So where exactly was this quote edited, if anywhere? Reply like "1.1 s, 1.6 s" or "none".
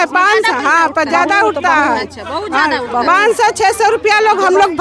none

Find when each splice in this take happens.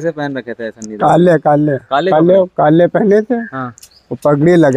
none

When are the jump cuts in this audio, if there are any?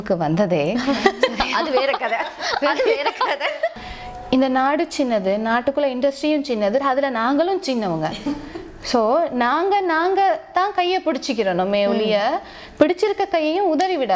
3.8 s

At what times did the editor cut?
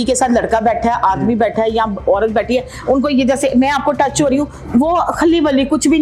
none

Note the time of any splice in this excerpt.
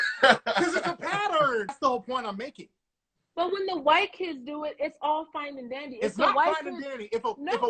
1.7 s

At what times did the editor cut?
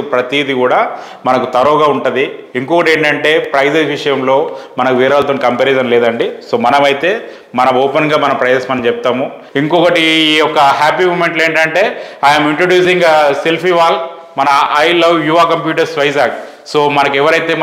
9.4 s

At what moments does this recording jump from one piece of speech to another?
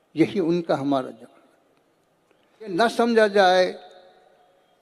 2.7 s

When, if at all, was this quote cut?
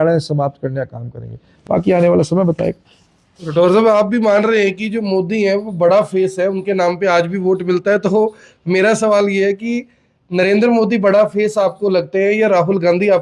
1.5 s

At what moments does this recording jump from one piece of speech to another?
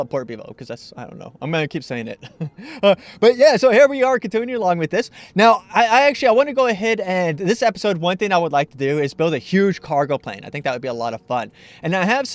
6.8 s

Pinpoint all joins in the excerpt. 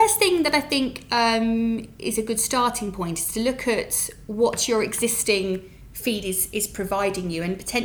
none

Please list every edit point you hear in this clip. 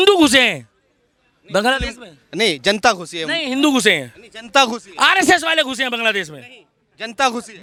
none

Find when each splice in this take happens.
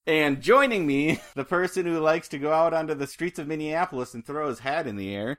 1.6 s

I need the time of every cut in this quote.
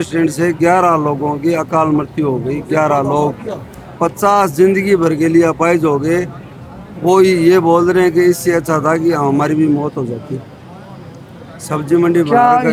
none

